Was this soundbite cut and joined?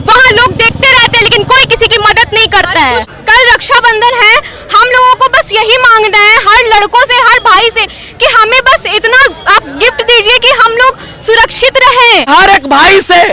yes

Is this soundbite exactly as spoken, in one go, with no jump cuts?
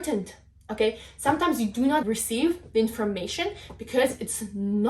no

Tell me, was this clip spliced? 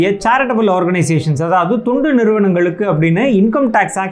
no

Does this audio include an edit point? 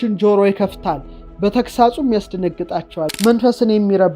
yes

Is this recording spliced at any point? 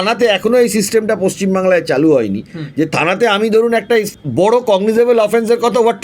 yes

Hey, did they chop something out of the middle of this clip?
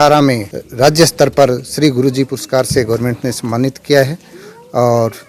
no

